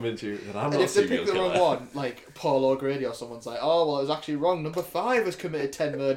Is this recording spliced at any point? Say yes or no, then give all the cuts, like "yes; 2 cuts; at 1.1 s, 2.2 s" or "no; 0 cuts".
no; 0 cuts